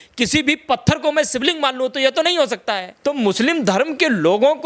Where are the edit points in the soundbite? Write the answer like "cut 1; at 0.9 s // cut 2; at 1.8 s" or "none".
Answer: cut 1; at 2.9 s

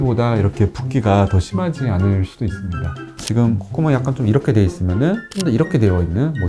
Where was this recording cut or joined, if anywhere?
cut 1; at 3.1 s

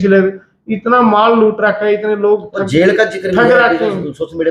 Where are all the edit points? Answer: none

